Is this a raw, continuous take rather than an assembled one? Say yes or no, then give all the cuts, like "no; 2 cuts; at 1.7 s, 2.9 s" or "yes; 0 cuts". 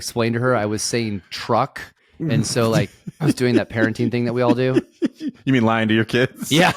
yes; 0 cuts